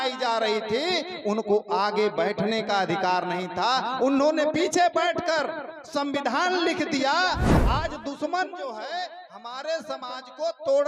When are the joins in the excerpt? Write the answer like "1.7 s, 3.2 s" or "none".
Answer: 7.5 s